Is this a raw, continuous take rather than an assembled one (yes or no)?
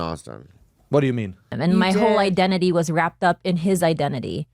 no